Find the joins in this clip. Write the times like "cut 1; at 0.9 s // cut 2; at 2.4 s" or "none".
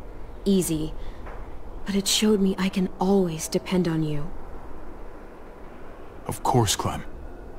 none